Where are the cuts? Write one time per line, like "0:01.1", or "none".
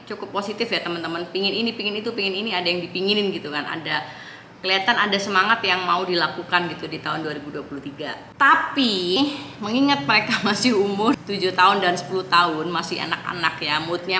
0:09.2